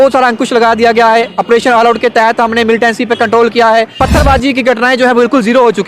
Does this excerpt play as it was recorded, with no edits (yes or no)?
no